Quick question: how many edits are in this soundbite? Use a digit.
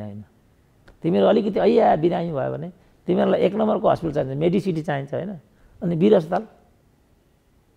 0